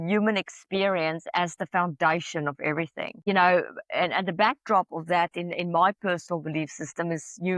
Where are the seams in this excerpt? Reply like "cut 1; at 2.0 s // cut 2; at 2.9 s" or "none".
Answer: cut 1; at 3.1 s